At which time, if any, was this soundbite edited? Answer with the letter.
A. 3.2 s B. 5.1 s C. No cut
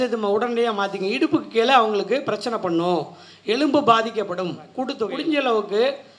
B